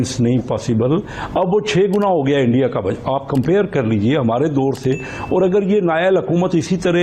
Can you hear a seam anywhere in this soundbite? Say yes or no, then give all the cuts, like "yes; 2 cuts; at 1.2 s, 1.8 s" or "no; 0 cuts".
no; 0 cuts